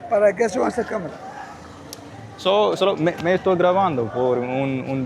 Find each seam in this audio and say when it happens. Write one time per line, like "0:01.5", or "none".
none